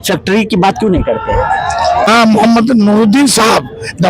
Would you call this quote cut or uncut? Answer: cut